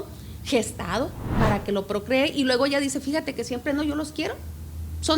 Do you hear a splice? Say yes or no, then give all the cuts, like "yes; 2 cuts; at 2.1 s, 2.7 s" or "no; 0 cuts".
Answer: yes; 1 cut; at 1.2 s